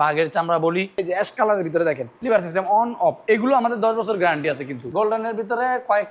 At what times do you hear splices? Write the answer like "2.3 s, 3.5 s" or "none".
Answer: 0.9 s, 2.1 s, 4.7 s

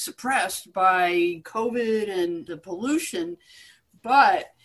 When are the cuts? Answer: 1.4 s, 2.5 s

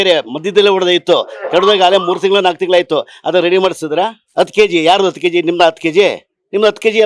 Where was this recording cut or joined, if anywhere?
4.2 s

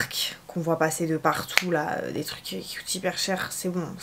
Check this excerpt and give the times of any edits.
none

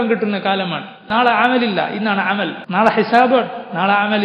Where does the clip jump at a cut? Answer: 1.1 s, 2.6 s

